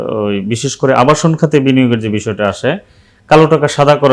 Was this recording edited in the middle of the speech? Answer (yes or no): no